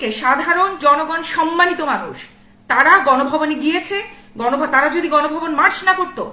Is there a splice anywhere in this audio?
no; 0 cuts

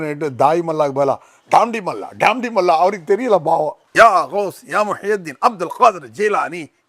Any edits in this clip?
no; 0 cuts

